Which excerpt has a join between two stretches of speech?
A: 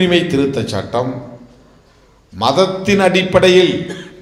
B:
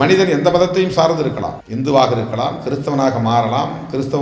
B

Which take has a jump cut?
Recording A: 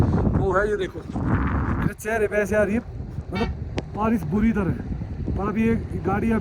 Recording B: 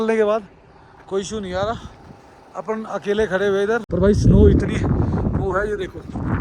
B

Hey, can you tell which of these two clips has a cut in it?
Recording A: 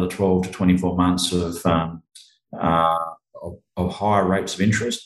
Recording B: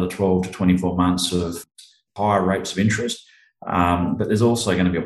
B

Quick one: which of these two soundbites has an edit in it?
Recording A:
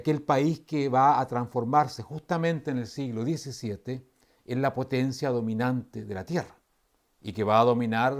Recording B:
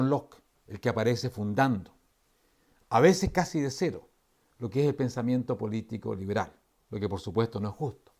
B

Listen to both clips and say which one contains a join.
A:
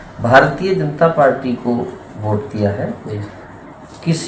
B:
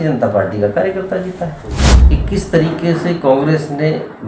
B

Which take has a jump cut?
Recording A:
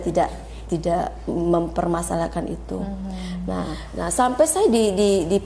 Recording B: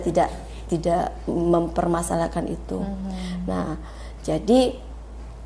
A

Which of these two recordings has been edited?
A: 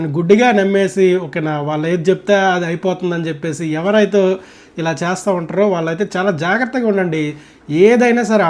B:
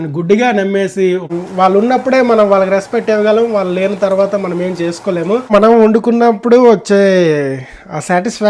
B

